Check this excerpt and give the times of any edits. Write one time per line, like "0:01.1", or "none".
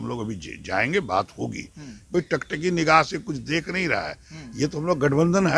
0:02.0